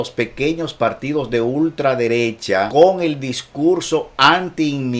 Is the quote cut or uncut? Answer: cut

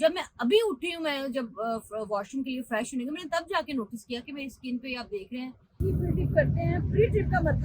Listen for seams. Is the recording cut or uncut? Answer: cut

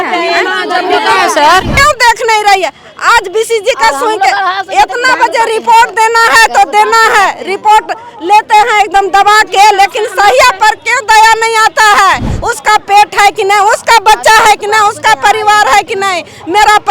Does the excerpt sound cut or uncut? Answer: cut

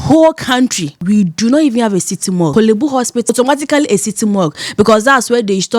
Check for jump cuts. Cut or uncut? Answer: cut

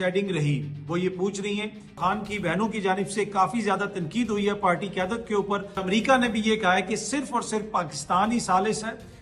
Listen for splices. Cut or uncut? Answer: cut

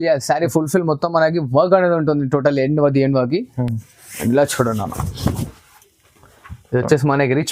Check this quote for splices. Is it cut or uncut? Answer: uncut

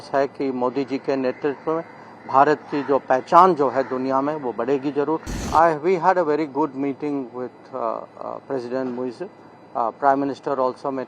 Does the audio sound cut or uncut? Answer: cut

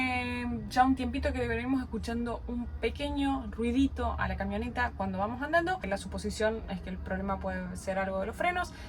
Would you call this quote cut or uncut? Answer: uncut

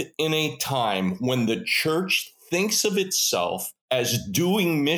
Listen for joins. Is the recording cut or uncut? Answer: cut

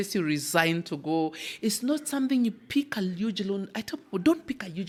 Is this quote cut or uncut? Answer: uncut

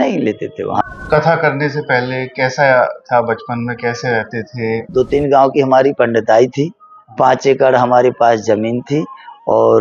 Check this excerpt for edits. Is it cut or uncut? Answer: cut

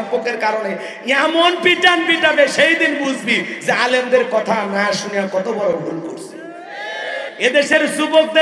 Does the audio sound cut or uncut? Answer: cut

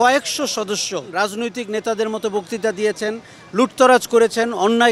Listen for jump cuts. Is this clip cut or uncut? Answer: cut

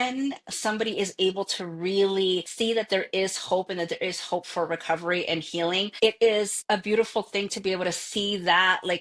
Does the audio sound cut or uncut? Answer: cut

